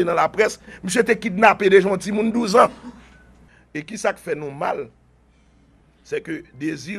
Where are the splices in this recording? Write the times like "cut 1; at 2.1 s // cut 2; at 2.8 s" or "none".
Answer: none